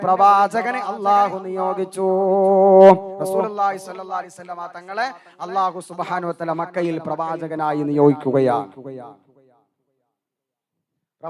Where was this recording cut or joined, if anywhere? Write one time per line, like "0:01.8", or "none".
none